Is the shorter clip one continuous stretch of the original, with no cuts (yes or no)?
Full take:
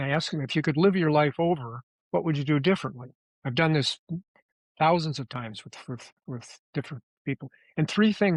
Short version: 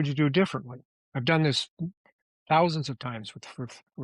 yes